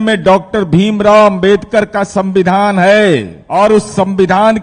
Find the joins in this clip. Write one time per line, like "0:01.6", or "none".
0:03.4